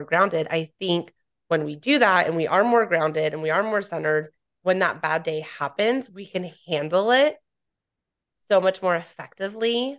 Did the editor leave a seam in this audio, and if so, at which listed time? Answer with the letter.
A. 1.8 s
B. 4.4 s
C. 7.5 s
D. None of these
D